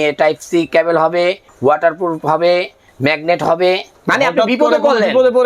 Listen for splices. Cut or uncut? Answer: cut